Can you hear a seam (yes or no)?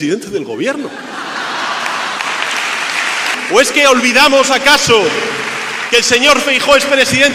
yes